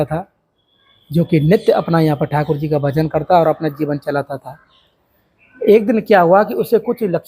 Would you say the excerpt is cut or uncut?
uncut